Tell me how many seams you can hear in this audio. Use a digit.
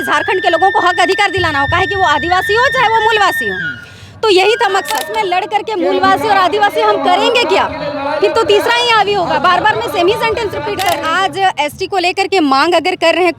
2